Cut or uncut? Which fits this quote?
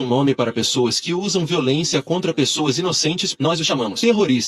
cut